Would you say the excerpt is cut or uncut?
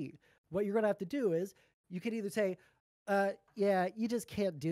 uncut